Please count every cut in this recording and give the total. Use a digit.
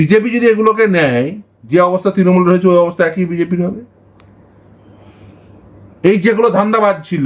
0